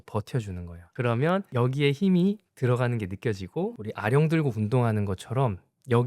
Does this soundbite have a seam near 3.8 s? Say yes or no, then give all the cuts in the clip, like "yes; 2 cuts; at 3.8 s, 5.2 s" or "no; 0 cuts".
yes; 1 cut; at 3.8 s